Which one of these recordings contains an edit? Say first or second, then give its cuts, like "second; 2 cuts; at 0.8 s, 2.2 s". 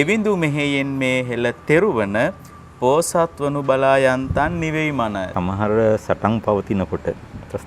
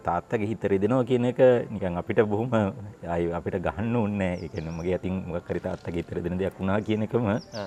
first; 1 cut; at 5.3 s